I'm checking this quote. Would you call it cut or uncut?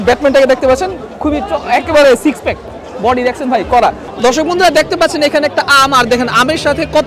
cut